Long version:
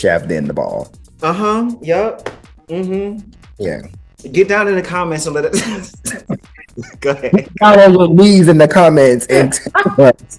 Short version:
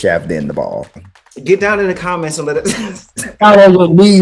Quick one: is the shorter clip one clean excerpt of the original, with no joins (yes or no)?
no